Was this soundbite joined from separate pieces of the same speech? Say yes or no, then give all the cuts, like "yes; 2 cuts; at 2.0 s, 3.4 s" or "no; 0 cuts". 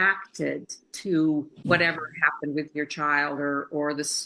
yes; 1 cut; at 1.6 s